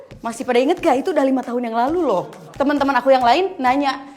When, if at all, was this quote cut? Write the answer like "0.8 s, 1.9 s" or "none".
2.5 s